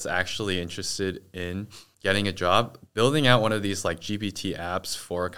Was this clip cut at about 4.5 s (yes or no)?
no